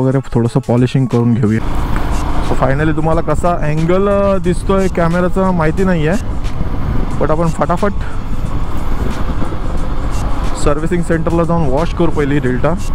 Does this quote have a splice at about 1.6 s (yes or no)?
yes